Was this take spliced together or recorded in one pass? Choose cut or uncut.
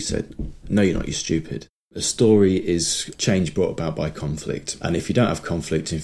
cut